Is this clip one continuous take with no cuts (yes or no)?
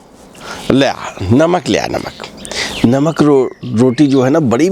yes